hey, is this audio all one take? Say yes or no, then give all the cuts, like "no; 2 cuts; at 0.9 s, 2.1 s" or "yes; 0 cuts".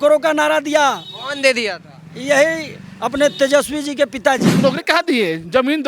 no; 1 cut; at 4.6 s